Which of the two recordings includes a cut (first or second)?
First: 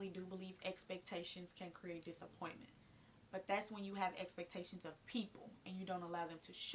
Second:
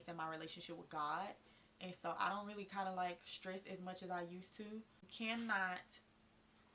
second